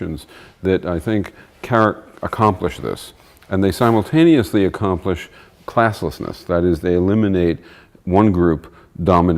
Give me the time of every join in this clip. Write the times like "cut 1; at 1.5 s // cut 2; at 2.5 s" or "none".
cut 1; at 6.4 s